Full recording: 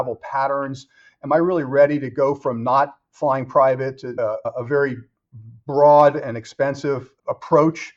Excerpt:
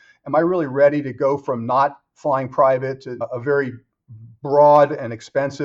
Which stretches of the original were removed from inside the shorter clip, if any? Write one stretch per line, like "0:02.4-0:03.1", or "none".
0:04.1-0:04.4